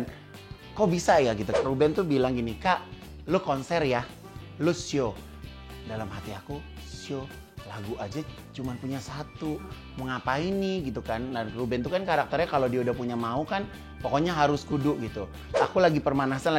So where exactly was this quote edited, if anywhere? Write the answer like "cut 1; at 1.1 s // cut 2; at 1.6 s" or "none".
cut 1; at 1.5 s // cut 2; at 15.6 s